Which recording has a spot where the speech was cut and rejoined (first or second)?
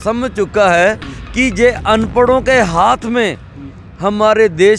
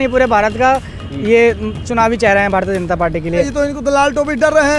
second